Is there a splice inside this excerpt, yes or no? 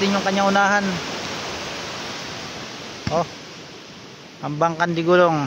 no